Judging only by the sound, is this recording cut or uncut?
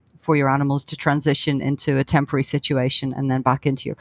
uncut